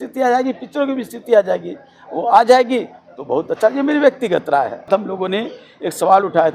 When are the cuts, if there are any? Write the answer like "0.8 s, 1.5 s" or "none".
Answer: 4.9 s